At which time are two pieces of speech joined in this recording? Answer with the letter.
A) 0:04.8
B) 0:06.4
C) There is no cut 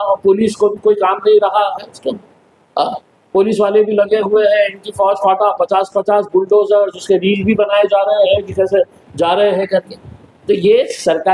C